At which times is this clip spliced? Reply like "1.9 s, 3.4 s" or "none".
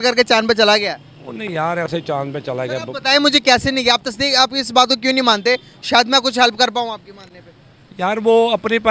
none